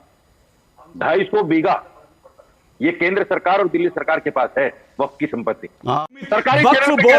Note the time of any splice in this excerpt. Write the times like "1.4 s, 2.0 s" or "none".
6.2 s